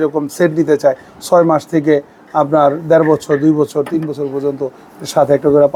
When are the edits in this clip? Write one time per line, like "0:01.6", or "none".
none